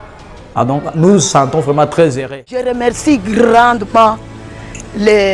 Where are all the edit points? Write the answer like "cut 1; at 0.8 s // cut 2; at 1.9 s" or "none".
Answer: cut 1; at 2.7 s